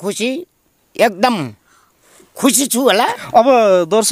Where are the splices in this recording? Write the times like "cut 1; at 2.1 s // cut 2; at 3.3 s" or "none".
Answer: cut 1; at 3.2 s